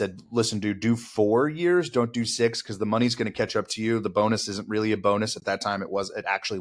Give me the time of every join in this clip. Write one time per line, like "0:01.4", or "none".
none